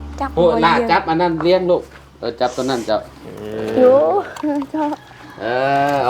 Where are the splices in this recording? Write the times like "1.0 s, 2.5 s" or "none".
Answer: none